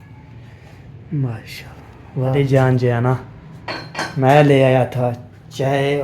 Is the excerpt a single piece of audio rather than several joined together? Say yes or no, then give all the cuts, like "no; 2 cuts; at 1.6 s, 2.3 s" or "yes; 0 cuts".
no; 1 cut; at 2.3 s